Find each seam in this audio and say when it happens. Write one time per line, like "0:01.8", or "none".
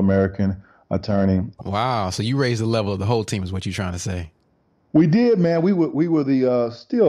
0:01.5